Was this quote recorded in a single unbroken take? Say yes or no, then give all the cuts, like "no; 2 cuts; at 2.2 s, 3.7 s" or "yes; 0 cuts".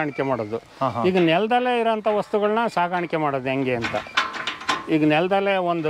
yes; 0 cuts